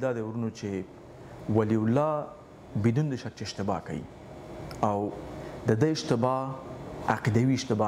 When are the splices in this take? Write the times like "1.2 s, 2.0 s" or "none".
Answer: none